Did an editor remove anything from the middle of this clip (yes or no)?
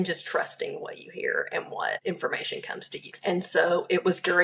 yes